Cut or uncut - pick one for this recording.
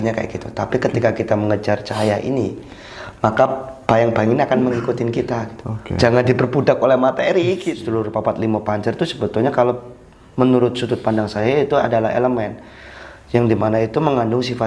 cut